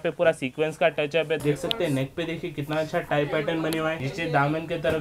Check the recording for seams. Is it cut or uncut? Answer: cut